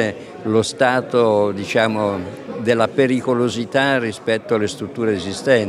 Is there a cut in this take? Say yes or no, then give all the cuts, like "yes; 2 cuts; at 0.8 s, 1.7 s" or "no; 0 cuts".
no; 0 cuts